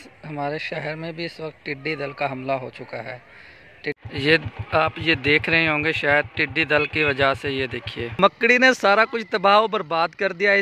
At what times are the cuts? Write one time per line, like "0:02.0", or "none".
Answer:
0:04.0
0:08.2